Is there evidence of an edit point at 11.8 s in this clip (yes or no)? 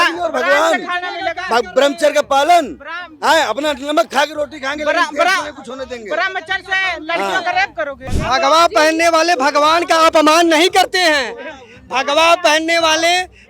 no